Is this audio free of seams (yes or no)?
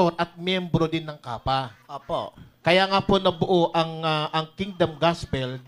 yes